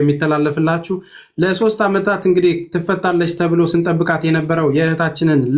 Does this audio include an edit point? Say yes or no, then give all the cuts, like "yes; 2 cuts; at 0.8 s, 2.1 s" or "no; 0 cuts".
no; 0 cuts